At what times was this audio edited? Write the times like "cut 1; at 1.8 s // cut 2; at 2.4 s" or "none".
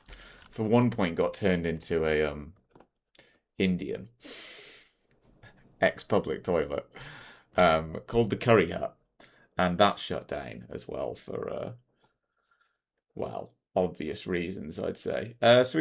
none